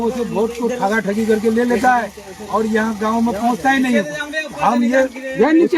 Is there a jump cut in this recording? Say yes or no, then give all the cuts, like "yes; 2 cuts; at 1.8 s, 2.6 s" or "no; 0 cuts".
no; 0 cuts